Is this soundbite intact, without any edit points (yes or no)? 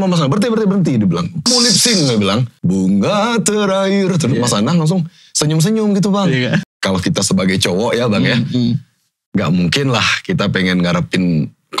no